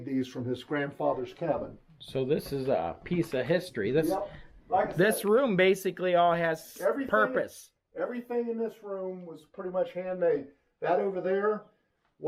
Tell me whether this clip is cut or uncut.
uncut